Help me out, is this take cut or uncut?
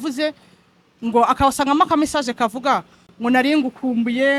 uncut